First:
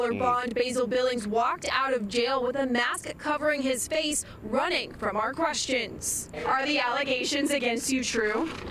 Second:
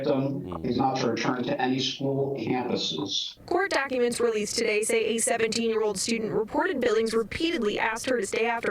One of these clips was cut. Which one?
second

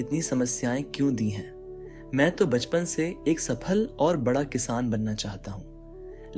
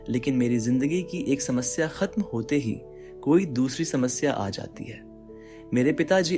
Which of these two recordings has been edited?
second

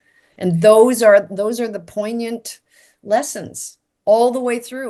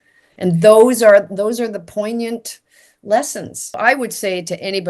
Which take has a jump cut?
second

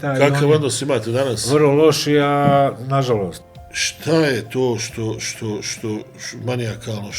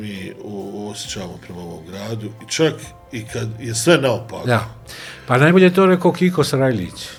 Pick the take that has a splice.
first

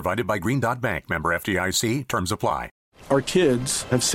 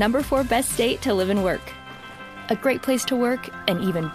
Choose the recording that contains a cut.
first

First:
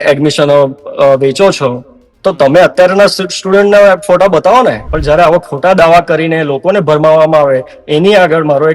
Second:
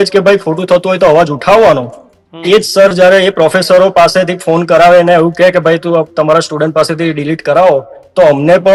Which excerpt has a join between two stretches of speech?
first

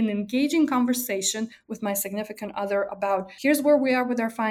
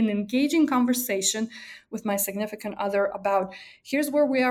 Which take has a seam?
first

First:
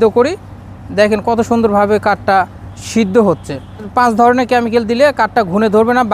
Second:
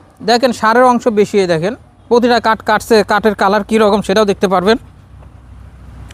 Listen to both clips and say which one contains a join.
first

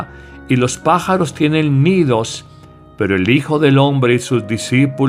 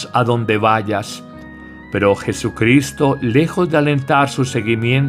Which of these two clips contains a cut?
second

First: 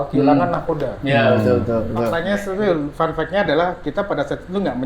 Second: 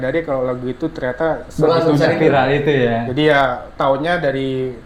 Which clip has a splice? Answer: first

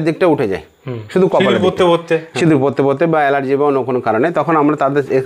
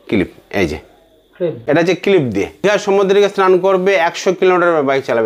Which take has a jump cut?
second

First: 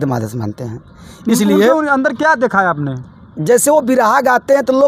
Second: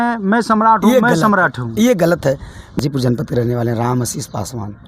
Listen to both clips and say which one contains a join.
second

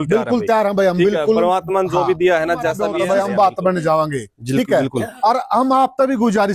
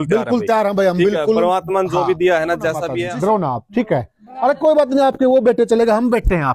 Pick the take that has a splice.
second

